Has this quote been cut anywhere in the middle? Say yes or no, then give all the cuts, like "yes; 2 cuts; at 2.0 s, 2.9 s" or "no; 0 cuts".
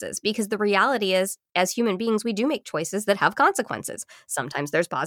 no; 0 cuts